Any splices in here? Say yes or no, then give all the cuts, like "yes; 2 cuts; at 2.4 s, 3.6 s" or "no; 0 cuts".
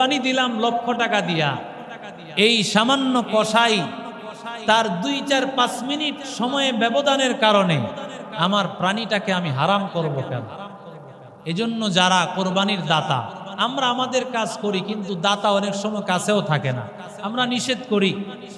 no; 0 cuts